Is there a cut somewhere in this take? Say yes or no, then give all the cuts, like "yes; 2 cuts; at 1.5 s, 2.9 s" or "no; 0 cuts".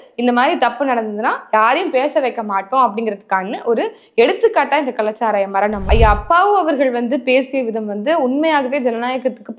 yes; 1 cut; at 5.9 s